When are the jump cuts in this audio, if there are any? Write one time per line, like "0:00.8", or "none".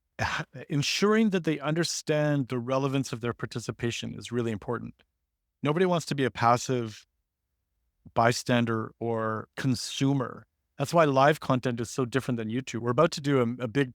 0:12.8